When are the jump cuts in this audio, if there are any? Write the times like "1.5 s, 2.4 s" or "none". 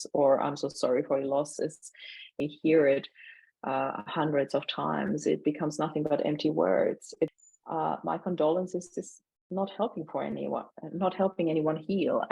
2.4 s, 7.4 s